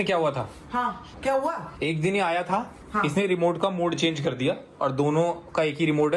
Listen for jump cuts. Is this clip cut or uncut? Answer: cut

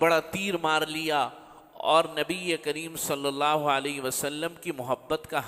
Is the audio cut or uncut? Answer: uncut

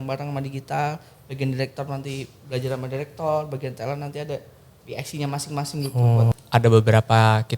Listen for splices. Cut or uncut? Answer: cut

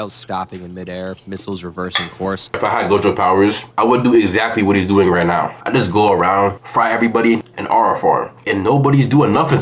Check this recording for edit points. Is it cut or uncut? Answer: cut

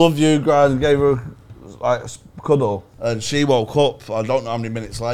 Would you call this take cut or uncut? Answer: cut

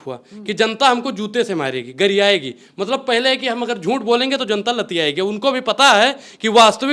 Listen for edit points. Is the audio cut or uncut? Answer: uncut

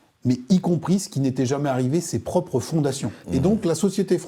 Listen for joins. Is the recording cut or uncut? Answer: cut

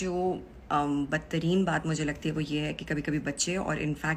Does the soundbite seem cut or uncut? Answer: uncut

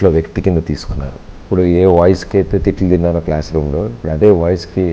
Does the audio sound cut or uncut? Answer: cut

